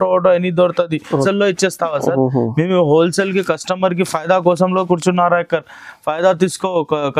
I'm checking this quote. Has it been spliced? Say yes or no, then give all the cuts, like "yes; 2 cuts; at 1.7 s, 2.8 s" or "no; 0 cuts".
yes; 1 cut; at 1.1 s